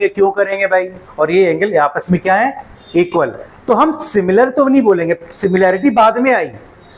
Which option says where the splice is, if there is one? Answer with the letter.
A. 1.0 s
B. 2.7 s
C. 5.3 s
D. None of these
A